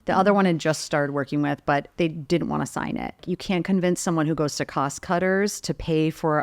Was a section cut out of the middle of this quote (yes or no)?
yes